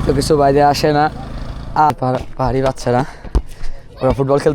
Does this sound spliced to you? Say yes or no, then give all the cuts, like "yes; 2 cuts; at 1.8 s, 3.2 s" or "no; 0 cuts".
yes; 1 cut; at 1.9 s